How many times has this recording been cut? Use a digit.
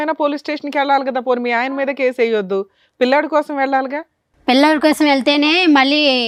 0